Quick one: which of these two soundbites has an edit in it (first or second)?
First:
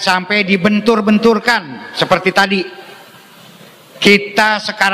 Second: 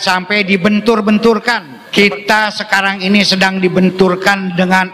second